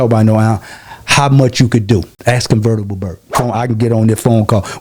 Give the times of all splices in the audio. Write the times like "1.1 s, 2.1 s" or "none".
2.1 s, 3.4 s